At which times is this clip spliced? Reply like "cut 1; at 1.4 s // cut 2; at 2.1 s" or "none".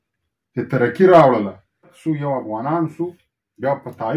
cut 1; at 2.0 s